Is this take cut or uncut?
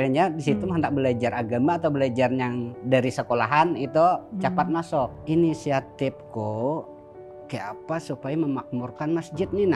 cut